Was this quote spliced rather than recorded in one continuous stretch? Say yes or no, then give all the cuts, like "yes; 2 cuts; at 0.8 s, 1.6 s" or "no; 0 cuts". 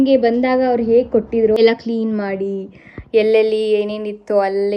yes; 1 cut; at 1.6 s